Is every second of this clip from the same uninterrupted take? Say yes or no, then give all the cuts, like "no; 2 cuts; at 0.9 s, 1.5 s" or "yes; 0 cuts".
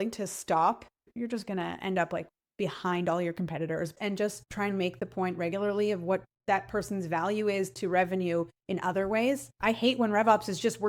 no; 3 cuts; at 1.0 s, 3.9 s, 9.6 s